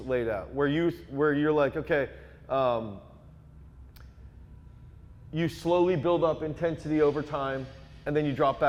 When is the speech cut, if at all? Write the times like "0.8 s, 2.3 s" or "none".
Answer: none